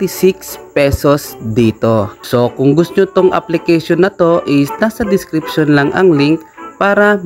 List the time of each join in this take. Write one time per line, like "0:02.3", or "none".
0:02.2